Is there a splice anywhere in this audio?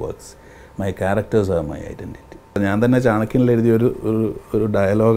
yes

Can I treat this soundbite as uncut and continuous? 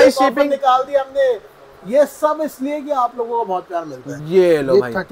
no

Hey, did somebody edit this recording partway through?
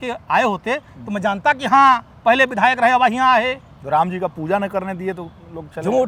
no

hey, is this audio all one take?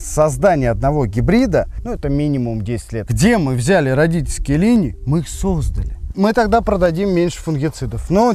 no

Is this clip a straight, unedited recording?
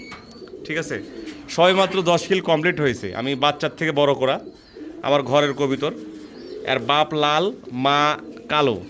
yes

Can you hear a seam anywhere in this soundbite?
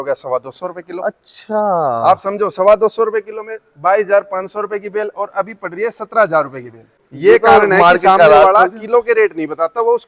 yes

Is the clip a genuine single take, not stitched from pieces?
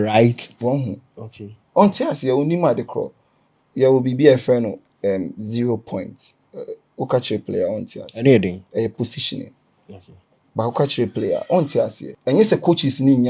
no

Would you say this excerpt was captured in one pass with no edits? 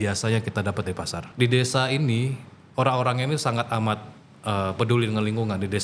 no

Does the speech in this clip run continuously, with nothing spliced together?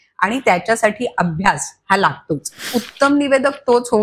no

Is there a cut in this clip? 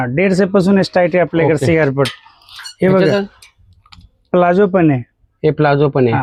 no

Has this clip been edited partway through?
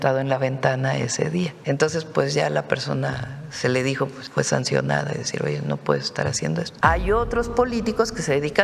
yes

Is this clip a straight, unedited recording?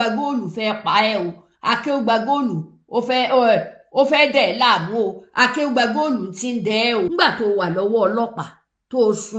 no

